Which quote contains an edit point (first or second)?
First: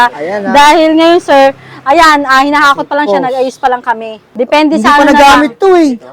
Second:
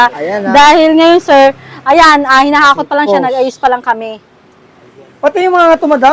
first